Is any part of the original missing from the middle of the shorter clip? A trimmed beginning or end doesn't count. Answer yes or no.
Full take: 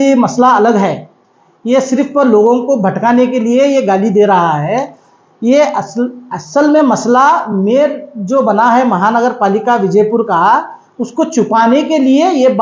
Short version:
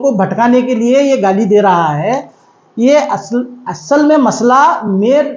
no